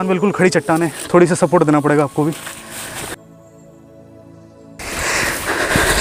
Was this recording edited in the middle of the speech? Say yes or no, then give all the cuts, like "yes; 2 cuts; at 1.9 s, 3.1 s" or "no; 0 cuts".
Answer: no; 0 cuts